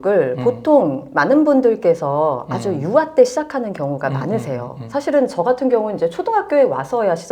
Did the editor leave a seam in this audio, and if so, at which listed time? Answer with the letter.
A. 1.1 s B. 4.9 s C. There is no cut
C